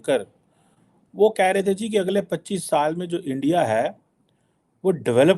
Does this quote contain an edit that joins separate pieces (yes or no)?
no